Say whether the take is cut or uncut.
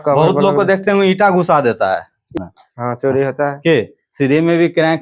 cut